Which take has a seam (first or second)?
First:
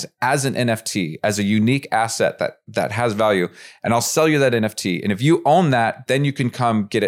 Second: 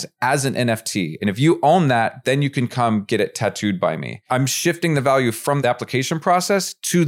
second